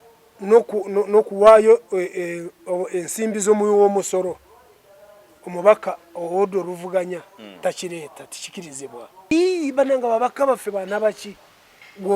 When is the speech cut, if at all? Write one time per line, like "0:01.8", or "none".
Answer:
0:09.3